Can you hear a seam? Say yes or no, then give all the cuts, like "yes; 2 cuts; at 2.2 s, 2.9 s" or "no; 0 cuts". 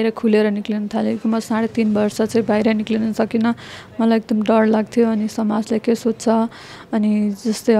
no; 0 cuts